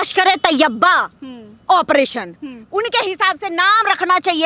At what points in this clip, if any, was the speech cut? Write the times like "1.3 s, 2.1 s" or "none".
none